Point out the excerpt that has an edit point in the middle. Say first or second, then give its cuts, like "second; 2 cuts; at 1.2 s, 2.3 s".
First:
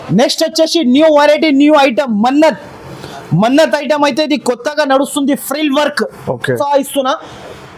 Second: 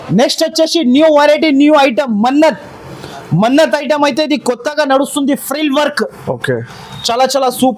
first; 1 cut; at 6.6 s